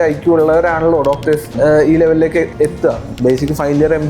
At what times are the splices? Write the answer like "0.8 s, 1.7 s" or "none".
1.5 s